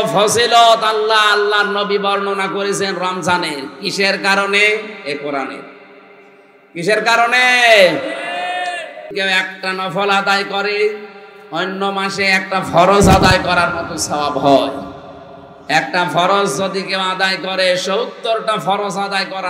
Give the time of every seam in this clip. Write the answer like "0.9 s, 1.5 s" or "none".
9.1 s